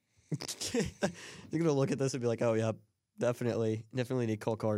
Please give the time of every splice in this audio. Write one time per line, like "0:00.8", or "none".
none